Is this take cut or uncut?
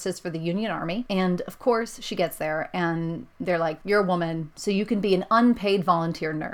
cut